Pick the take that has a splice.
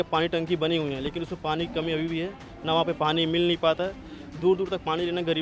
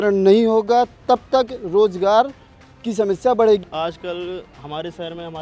second; 1 cut; at 3.7 s

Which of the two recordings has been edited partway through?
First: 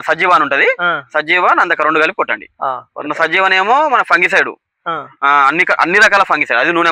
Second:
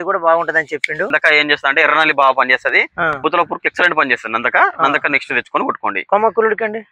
second; 2 cuts; at 1.1 s, 3.2 s

